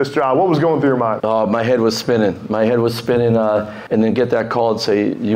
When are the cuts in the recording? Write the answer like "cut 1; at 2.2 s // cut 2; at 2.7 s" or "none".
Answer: cut 1; at 1.2 s // cut 2; at 3.8 s